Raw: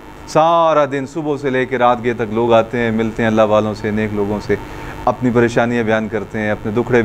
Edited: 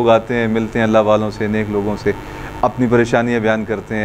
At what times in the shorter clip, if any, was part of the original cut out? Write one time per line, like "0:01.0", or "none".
none